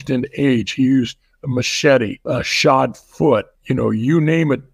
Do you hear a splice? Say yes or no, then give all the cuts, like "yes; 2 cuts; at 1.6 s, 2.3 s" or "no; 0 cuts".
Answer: yes; 2 cuts; at 2.2 s, 3.6 s